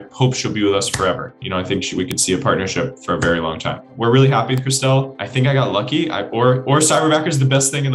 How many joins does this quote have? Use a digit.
2